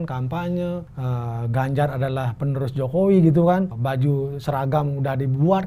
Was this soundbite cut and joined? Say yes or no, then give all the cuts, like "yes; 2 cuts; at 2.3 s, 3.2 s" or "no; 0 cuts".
yes; 2 cuts; at 0.9 s, 3.8 s